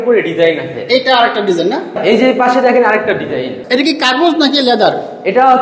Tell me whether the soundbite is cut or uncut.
cut